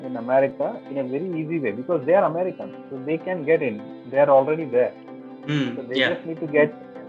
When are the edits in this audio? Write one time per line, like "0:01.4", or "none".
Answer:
none